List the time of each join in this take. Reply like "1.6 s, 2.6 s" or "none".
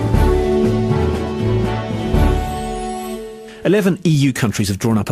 none